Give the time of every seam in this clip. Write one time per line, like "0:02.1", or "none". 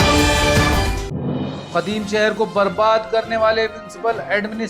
0:01.5